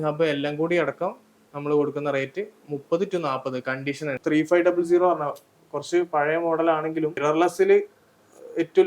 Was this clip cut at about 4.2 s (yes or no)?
yes